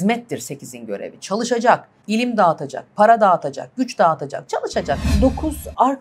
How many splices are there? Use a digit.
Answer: 2